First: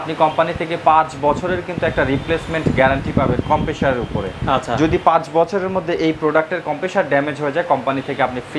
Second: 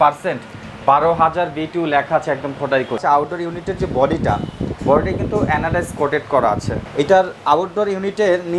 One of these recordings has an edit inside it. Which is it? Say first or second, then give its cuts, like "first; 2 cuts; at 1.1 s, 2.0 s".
second; 2 cuts; at 3.0 s, 6.8 s